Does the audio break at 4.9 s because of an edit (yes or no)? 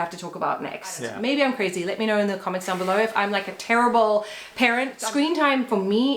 yes